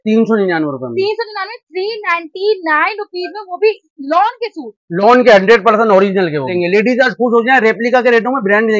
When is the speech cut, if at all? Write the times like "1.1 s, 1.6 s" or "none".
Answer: 6.5 s